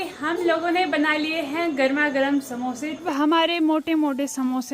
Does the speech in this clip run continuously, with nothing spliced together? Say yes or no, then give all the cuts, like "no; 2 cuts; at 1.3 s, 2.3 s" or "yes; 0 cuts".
no; 1 cut; at 3.0 s